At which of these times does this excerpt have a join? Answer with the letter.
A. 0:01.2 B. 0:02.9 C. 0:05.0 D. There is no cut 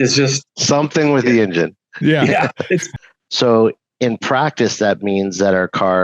B